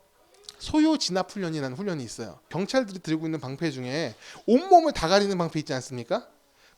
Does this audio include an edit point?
yes; 1 cut; at 2.4 s

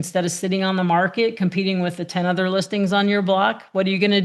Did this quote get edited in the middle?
no; 0 cuts

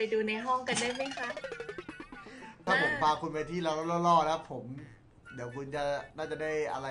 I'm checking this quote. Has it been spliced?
yes; 1 cut; at 2.6 s

